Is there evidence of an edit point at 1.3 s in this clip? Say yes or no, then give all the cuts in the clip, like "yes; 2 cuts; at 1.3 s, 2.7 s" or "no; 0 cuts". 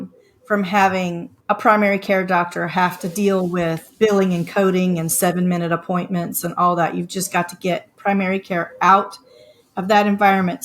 yes; 1 cut; at 1.3 s